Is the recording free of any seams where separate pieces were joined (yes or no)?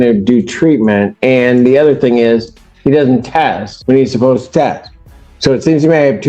no